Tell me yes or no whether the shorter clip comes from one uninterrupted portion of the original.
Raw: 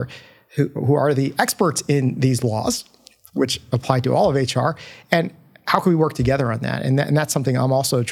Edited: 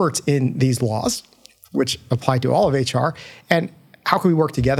yes